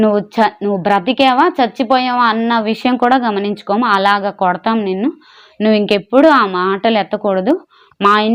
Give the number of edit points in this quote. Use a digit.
0